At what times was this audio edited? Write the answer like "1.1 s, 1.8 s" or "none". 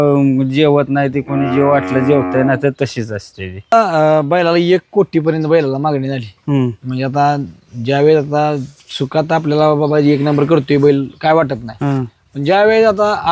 3.7 s